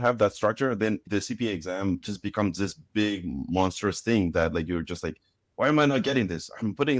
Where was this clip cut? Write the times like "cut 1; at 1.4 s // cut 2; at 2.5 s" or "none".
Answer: cut 1; at 1.0 s